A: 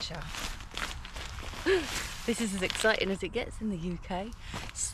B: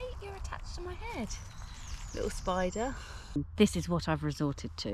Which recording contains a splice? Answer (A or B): B